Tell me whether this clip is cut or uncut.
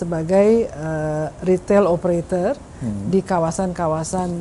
uncut